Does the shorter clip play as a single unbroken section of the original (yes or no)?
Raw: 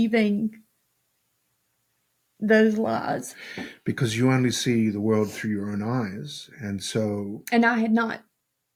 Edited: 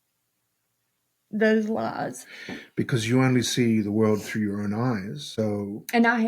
no